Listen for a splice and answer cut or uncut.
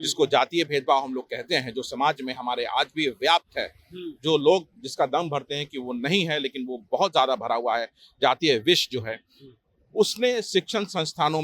uncut